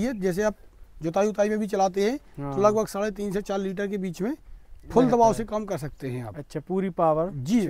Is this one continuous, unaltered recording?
yes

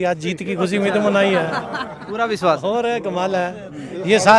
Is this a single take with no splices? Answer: yes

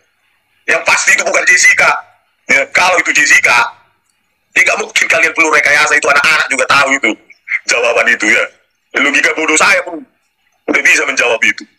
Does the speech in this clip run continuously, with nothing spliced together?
yes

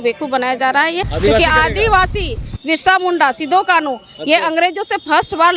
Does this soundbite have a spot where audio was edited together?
yes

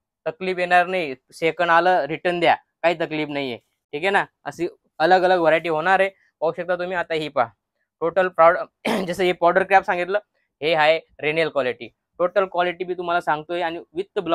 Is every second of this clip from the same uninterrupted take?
yes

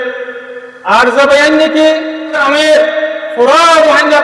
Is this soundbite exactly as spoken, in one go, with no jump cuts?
no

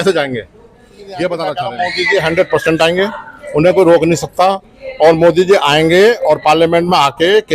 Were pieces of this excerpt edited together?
yes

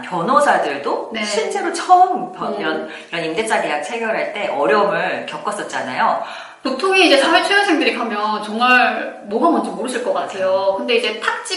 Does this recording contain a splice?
yes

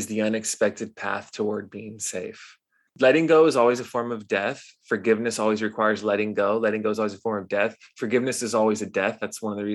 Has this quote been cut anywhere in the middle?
yes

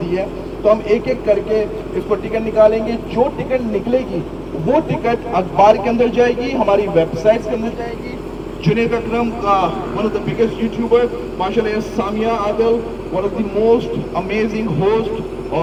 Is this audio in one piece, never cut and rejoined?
yes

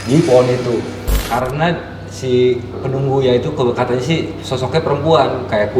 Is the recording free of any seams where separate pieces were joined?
no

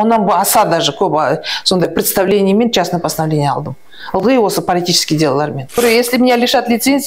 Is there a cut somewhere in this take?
yes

